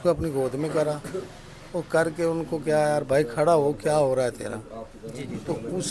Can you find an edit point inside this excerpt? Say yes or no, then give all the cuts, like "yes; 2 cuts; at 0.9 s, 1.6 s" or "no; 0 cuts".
no; 0 cuts